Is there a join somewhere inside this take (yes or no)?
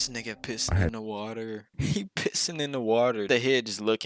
yes